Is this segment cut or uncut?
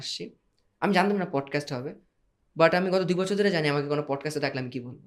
uncut